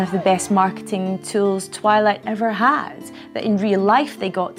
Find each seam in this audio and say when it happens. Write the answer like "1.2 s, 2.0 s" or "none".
none